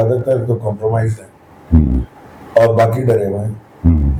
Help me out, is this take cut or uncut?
uncut